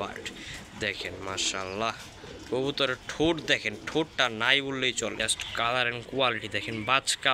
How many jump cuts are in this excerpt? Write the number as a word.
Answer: one